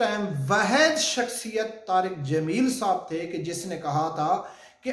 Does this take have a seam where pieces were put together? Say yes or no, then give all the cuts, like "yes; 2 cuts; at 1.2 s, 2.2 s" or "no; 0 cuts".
no; 0 cuts